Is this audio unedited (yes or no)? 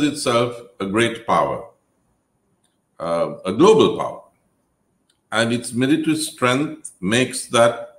yes